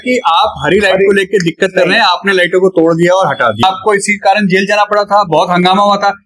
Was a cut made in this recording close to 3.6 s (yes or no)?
yes